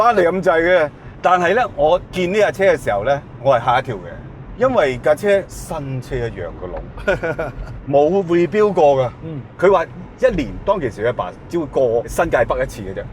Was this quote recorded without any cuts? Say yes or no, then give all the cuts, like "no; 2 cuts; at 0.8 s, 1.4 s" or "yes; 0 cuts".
no; 2 cuts; at 1.0 s, 9.4 s